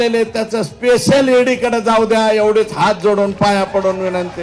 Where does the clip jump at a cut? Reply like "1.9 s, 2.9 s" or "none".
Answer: none